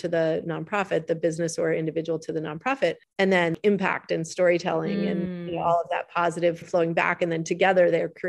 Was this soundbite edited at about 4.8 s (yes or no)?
no